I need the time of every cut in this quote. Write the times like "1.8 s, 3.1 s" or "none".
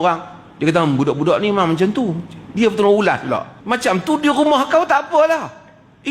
3.5 s